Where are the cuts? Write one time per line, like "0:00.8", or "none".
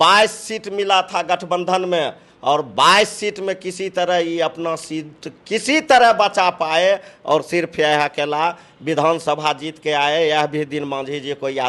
none